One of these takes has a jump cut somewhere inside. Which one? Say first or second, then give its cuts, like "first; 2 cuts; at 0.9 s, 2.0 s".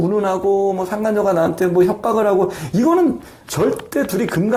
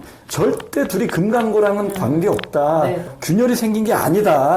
second; 1 cut; at 3.1 s